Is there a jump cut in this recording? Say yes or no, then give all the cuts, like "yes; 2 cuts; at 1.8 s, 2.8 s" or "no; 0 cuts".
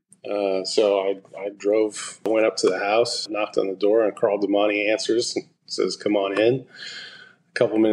yes; 2 cuts; at 2.3 s, 3.3 s